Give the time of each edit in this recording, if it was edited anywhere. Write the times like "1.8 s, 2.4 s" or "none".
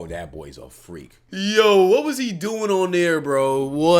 1.2 s